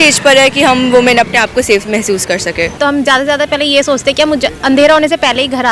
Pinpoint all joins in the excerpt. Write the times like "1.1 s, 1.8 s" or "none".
2.8 s